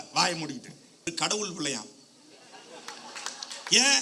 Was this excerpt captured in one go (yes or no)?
no